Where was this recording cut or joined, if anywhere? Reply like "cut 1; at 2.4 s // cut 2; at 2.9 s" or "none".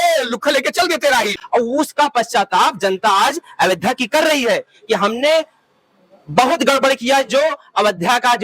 cut 1; at 1.3 s